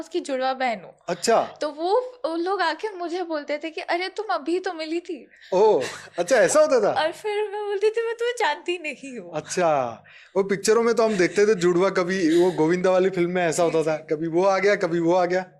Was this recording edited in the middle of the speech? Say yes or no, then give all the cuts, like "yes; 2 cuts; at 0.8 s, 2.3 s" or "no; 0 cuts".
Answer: no; 0 cuts